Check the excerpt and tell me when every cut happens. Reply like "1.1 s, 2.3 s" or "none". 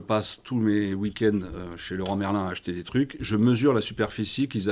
none